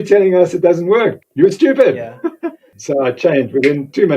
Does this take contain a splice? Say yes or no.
yes